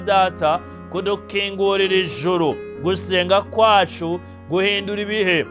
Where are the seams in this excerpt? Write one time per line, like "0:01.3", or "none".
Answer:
none